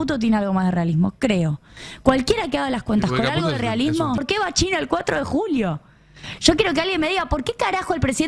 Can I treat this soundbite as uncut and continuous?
no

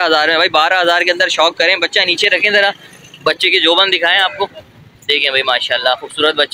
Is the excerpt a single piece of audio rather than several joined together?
yes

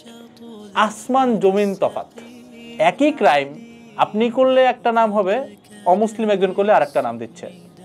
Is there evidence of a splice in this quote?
yes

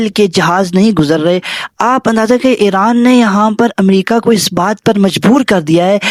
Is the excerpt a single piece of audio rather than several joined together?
yes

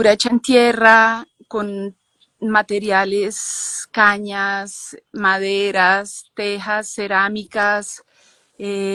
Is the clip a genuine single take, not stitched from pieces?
yes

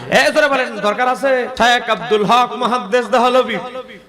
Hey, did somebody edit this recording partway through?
yes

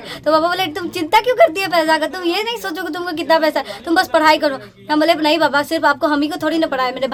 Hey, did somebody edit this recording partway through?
no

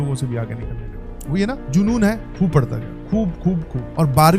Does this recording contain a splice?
no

